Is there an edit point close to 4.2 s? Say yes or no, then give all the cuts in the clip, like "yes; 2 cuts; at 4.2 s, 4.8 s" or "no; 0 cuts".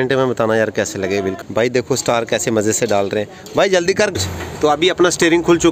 yes; 2 cuts; at 1.4 s, 4.2 s